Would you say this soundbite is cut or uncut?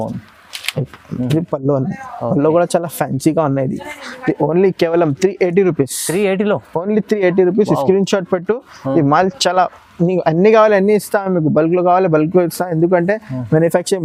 uncut